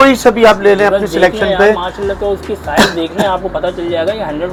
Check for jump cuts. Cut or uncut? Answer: uncut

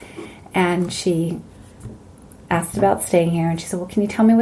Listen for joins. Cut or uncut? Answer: uncut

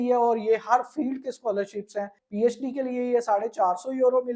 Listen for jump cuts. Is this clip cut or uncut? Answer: cut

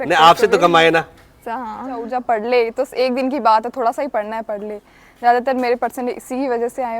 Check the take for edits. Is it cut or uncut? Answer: cut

